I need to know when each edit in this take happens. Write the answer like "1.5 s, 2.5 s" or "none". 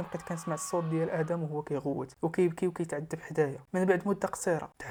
none